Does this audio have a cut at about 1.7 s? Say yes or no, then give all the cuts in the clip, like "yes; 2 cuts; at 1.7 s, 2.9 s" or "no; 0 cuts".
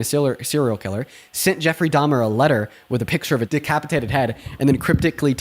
no; 1 cut; at 3.5 s